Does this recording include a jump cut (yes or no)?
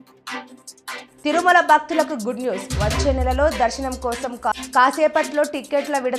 no